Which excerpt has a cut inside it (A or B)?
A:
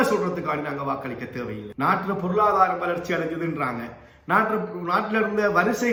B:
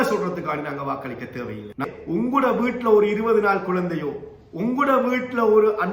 B